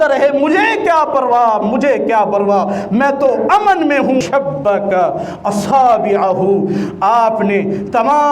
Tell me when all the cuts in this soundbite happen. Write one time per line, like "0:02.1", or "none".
0:04.2